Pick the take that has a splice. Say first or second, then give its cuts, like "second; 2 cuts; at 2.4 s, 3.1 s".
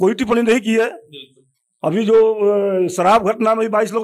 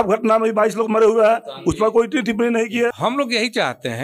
second; 1 cut; at 2.9 s